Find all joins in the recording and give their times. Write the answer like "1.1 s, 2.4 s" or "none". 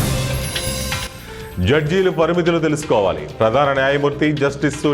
1.1 s